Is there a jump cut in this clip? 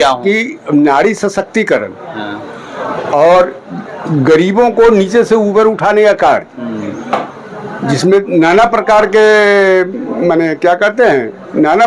no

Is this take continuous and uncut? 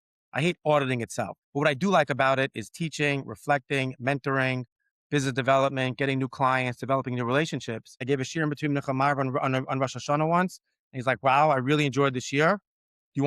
no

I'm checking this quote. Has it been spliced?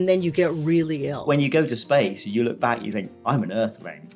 yes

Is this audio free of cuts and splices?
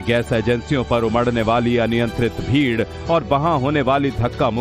no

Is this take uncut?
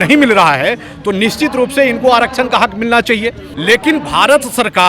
no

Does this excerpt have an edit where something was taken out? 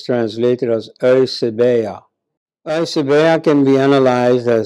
no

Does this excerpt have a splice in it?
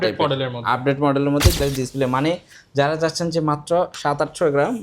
yes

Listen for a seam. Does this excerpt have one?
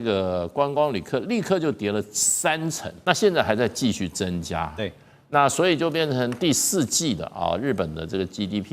yes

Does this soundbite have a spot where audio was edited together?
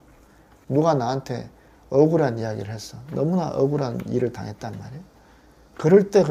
no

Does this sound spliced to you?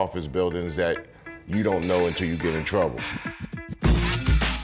yes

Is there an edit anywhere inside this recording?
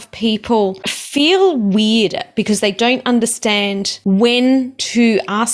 yes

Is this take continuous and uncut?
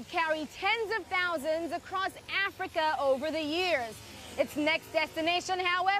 yes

